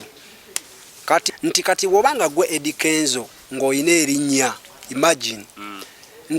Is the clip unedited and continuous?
no; 1 cut; at 1.3 s

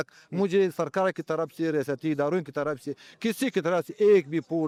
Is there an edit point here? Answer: no; 0 cuts

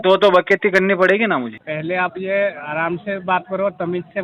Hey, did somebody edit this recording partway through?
yes; 1 cut; at 1.6 s

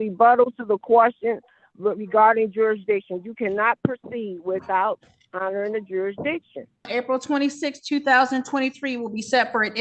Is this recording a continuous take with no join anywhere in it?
no; 1 cut; at 6.9 s

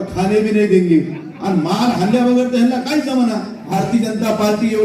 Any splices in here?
yes; 1 cut; at 3.6 s

